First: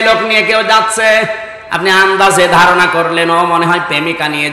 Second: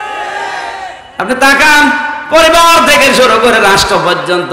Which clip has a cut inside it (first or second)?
second